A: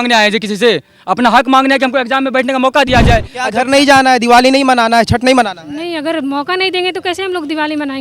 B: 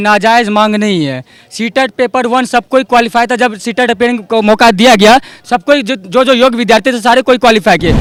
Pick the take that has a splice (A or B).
A